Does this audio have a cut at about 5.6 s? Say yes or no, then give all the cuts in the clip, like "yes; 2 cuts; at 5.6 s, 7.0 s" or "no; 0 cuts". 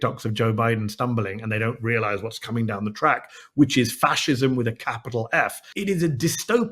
yes; 1 cut; at 5.6 s